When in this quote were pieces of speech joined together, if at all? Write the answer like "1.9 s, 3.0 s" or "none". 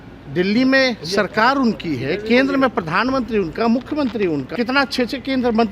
4.5 s